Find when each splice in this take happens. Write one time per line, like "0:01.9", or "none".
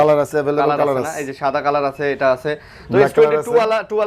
none